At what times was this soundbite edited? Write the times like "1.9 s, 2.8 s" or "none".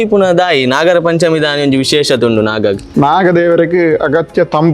2.8 s